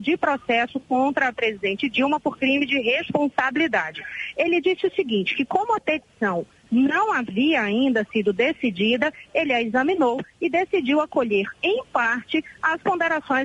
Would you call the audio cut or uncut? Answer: cut